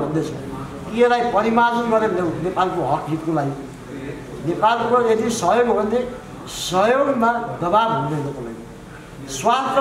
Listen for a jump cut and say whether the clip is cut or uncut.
uncut